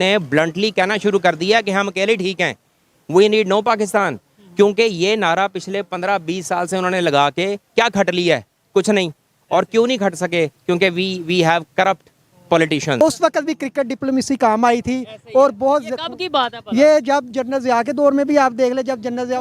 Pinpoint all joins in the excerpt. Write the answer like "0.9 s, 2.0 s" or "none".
13.0 s